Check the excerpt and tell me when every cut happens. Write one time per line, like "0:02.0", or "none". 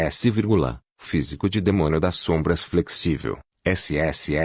0:03.5